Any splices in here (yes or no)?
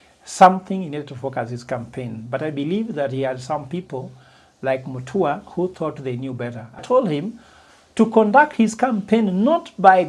yes